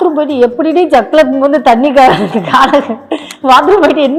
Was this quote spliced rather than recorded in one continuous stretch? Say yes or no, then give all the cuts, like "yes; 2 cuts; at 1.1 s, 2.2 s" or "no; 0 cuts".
no; 0 cuts